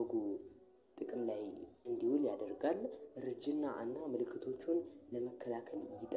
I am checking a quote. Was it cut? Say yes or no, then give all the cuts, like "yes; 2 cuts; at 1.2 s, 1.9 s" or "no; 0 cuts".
no; 0 cuts